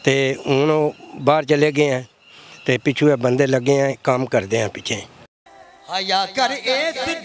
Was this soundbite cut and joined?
yes; 1 cut; at 5.4 s

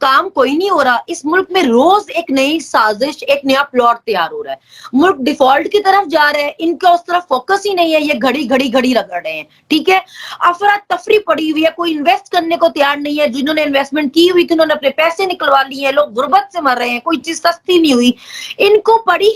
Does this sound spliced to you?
no; 0 cuts

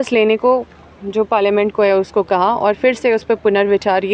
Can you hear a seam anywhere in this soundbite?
no; 0 cuts

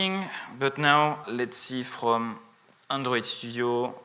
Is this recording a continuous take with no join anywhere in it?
no; 1 cut; at 1.3 s

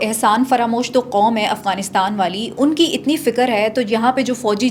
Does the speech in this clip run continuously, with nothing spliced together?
yes; 0 cuts

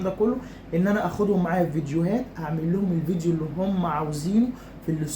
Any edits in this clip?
no; 0 cuts

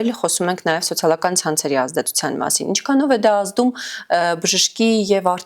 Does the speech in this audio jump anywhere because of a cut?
no; 0 cuts

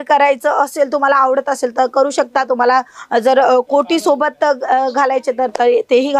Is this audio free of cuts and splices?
yes; 0 cuts

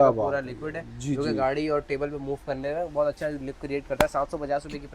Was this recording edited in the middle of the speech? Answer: no; 0 cuts

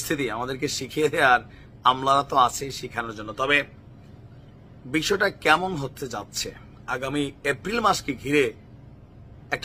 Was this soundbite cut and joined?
no; 0 cuts

